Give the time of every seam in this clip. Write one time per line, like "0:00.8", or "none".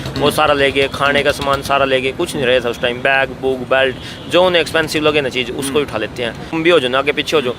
0:06.5

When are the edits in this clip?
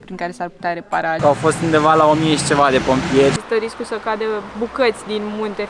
0:01.2
0:03.4
0:04.5

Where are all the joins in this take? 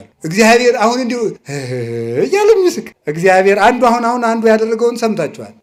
none

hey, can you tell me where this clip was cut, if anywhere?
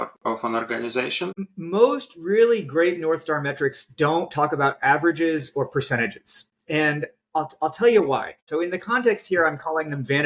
0:01.5
0:08.4

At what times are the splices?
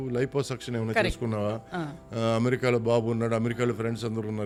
none

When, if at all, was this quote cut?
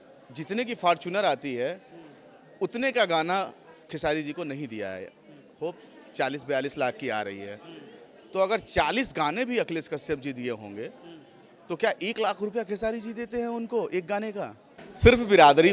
0:14.8

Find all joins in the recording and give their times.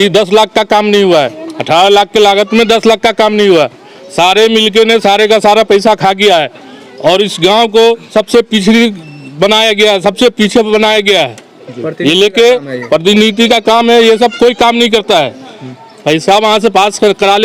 none

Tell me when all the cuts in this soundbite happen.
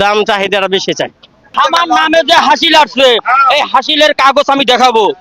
0:01.5

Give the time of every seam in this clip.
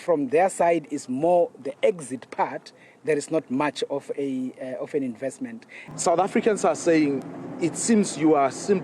0:05.9

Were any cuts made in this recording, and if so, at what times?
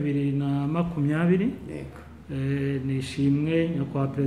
none

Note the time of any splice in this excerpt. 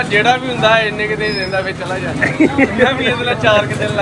none

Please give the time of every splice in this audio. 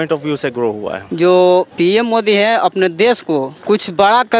0:01.0
0:01.7
0:03.5

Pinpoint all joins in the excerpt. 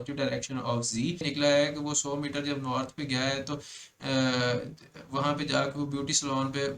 0:01.2

